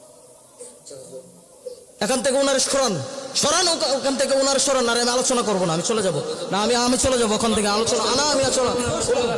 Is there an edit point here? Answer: no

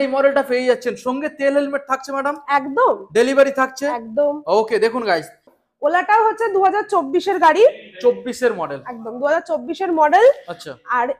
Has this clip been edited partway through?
yes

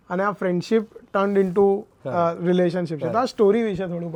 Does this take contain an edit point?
no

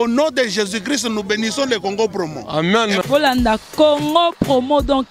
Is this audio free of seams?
yes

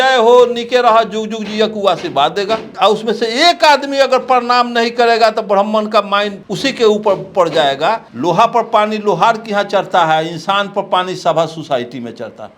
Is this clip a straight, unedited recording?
no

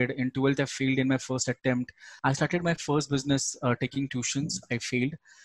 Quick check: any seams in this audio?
yes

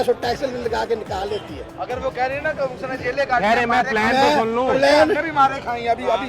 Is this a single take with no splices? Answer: no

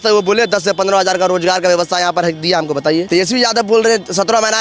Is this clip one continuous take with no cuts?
yes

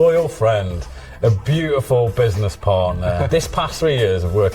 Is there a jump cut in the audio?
yes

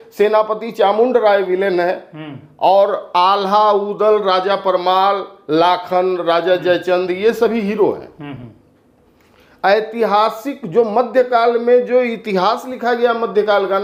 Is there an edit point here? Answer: no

